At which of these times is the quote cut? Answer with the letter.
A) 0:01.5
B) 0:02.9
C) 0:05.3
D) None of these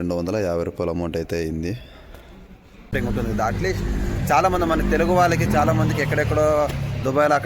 B